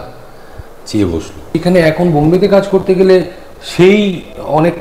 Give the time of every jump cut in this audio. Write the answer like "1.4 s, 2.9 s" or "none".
1.5 s

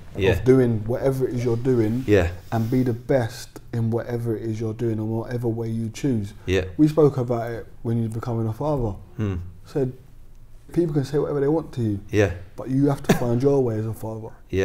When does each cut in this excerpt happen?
10.7 s

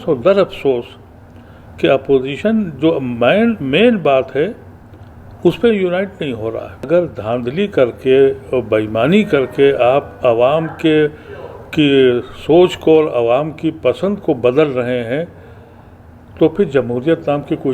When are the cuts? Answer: 6.9 s

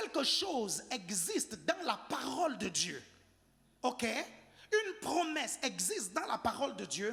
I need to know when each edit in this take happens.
none

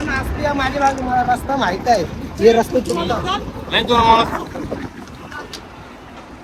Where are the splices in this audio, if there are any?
none

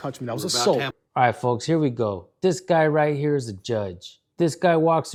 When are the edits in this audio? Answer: none

